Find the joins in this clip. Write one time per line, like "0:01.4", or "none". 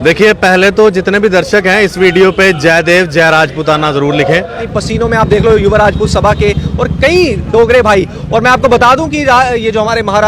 0:04.7